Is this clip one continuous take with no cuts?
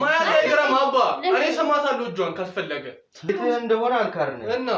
no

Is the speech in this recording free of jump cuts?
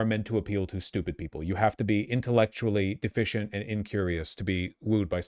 yes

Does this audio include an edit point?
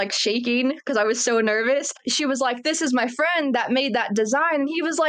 yes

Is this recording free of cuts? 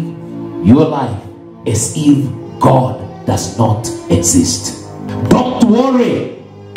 no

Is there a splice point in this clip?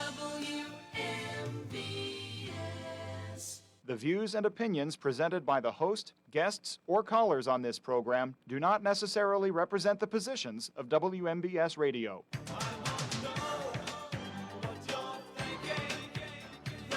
no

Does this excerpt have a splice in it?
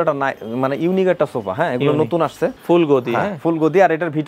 yes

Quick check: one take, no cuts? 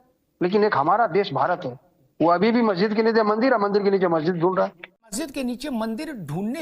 no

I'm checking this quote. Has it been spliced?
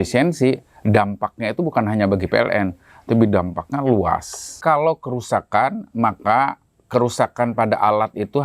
yes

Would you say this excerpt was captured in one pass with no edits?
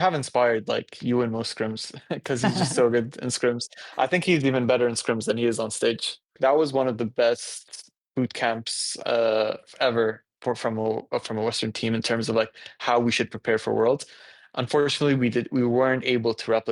no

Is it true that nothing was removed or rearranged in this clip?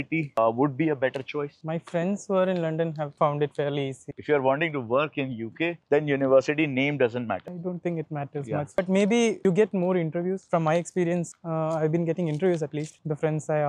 no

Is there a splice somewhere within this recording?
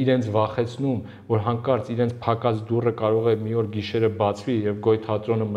no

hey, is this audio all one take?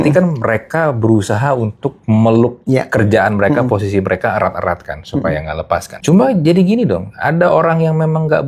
no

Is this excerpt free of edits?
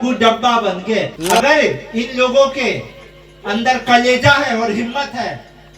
no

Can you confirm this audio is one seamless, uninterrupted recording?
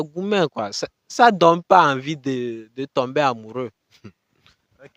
yes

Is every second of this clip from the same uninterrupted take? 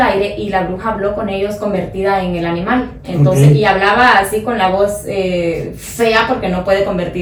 yes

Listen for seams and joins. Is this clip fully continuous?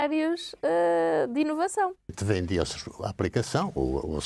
no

